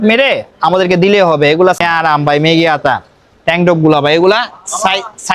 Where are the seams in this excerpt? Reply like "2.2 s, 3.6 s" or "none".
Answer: 1.8 s

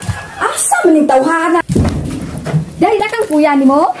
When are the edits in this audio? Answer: 1.6 s, 3.0 s

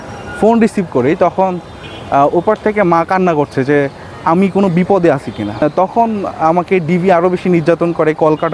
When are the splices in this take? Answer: 5.6 s

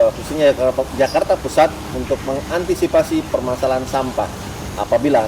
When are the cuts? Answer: none

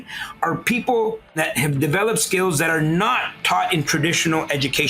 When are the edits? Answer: 1.4 s

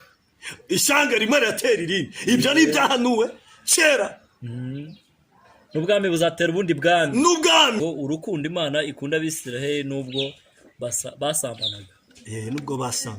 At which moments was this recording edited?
7.8 s

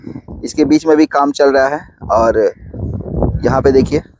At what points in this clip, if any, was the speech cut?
none

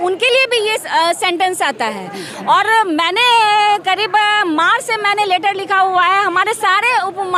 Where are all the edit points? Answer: none

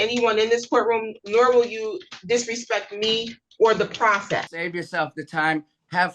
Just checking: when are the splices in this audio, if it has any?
4.6 s

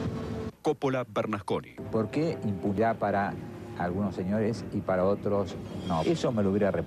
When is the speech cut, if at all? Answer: 2.8 s

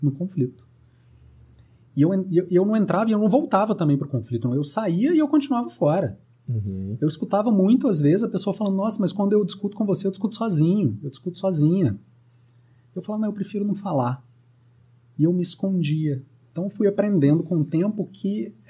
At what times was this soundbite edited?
16.4 s

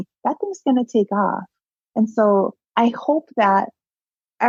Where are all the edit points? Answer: none

